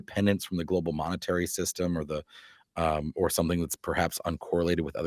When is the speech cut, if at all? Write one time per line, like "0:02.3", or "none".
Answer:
none